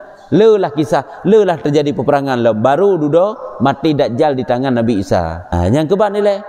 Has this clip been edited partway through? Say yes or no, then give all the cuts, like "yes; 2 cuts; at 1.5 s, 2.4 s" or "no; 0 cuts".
yes; 1 cut; at 5.5 s